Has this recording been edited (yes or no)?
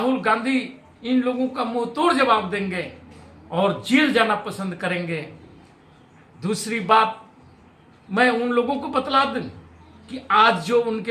no